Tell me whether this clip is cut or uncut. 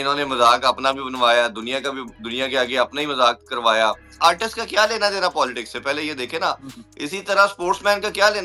cut